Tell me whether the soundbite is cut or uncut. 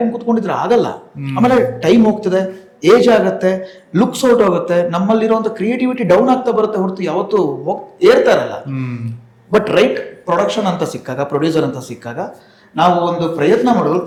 uncut